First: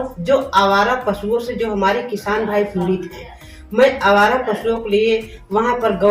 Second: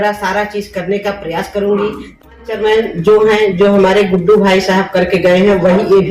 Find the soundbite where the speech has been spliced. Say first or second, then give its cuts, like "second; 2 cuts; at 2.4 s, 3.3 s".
second; 1 cut; at 2.5 s